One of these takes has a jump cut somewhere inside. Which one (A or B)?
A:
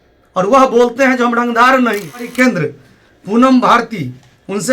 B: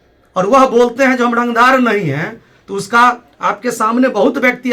A